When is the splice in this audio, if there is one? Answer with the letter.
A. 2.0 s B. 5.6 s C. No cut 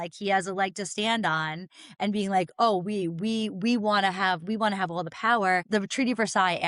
B